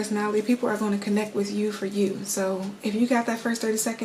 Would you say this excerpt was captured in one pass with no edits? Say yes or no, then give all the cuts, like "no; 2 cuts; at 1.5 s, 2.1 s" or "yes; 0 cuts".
yes; 0 cuts